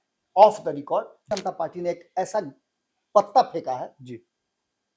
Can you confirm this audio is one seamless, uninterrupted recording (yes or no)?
no